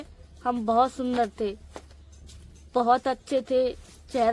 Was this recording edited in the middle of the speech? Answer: no; 0 cuts

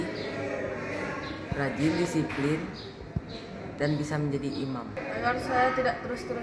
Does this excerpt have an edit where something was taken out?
yes; 1 cut; at 5.0 s

